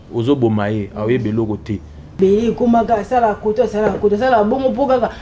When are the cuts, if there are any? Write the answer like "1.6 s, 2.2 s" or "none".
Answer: 2.1 s